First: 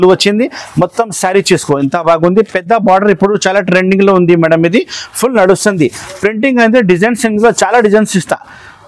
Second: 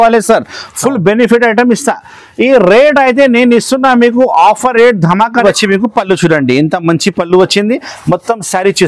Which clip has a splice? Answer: second; 1 cut; at 5.4 s

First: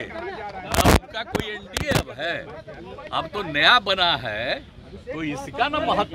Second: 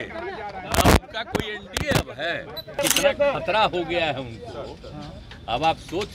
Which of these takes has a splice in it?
second; 1 cut; at 2.8 s

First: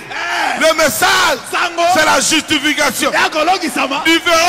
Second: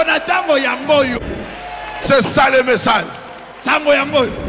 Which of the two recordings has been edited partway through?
second; 1 cut; at 1.1 s

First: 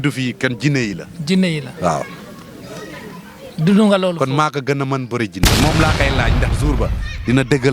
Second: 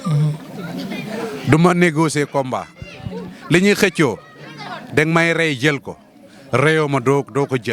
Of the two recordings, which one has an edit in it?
first; 1 cut; at 5.5 s

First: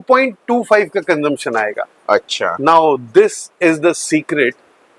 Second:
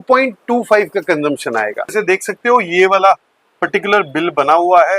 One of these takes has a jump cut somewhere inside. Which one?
second; 1 cut; at 1.9 s

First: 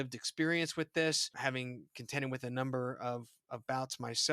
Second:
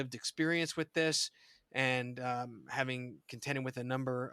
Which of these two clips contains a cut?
first; 1 cut; at 1.3 s

